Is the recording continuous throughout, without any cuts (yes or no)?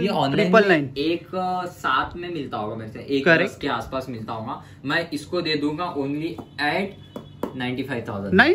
yes